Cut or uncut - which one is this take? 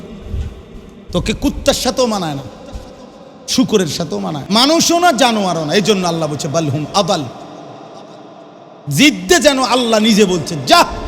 cut